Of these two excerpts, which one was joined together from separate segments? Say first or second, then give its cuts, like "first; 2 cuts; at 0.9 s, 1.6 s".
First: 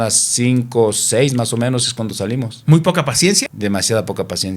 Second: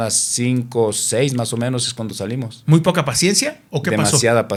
first; 1 cut; at 3.5 s